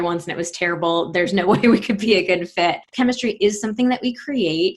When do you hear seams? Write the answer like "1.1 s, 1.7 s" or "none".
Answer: 2.9 s